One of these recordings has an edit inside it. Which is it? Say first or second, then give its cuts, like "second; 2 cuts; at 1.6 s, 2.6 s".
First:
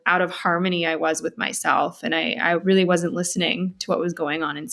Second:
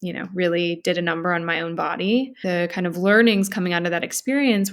second; 1 cut; at 2.3 s